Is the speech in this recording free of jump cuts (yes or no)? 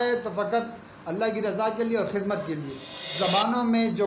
no